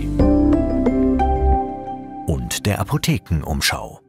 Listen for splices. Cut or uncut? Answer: cut